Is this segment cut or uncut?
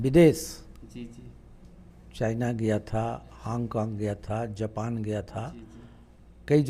uncut